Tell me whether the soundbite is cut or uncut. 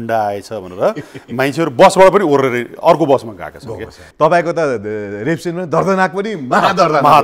cut